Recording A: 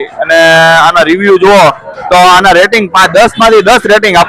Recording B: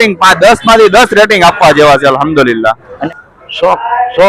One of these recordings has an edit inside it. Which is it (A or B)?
B